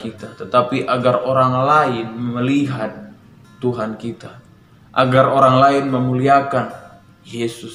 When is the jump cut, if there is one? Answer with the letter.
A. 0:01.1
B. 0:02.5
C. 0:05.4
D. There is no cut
D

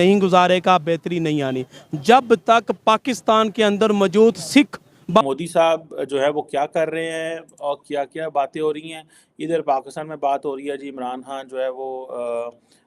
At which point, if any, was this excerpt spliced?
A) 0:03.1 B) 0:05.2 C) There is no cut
B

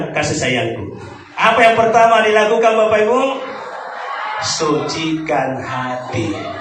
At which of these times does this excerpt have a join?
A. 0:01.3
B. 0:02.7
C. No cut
A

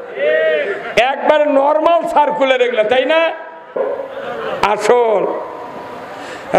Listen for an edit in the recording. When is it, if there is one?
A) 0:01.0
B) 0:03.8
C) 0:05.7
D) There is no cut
B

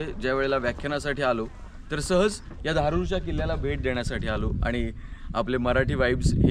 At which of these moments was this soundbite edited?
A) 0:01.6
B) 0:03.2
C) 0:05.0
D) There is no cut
D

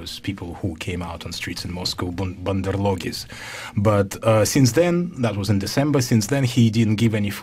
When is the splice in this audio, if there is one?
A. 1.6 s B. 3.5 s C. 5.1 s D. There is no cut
B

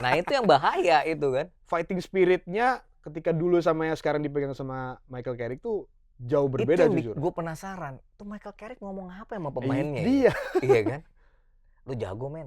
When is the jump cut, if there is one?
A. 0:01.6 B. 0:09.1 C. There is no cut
A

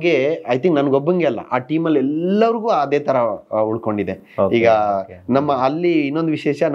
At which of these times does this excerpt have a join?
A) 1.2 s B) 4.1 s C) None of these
C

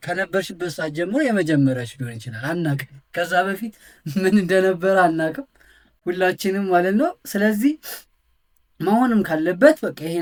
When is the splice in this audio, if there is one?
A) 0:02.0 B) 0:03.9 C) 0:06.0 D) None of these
D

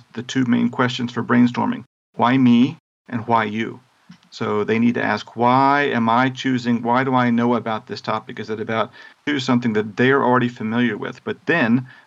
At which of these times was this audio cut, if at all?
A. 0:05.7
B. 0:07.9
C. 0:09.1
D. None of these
C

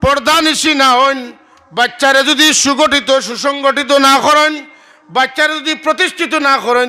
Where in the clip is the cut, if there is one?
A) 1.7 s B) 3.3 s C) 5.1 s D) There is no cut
D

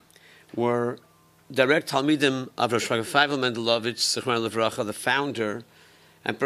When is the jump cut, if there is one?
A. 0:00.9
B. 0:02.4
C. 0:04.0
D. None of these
C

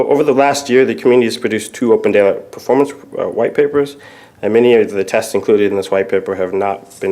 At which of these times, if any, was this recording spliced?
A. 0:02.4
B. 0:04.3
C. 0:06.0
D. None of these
D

